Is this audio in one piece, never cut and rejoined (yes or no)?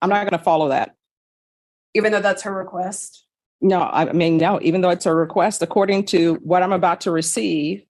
yes